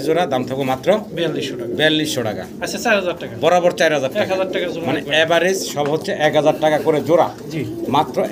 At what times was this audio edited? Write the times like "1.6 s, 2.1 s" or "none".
none